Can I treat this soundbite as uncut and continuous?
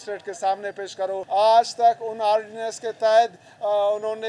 no; 1 cut; at 1.2 s

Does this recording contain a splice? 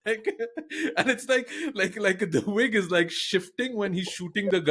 no; 0 cuts

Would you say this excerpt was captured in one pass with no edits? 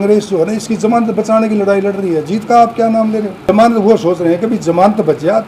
no; 1 cut; at 3.5 s

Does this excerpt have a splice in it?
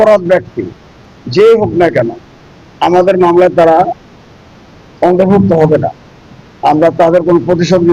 no; 0 cuts

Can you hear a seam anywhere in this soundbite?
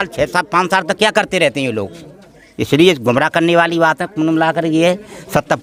no; 0 cuts

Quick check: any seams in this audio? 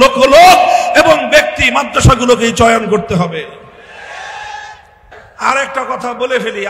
yes; 1 cut; at 5.1 s

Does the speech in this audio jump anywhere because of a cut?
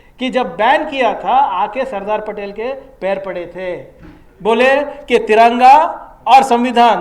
no; 0 cuts

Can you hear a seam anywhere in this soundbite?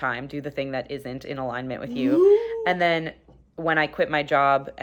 no; 0 cuts

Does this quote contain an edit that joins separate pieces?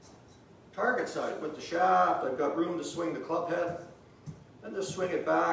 yes; 1 cut; at 1.4 s

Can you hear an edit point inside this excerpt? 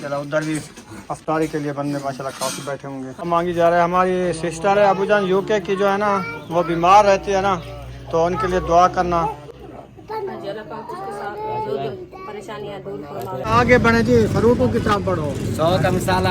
yes; 2 cuts; at 3.3 s, 13.5 s

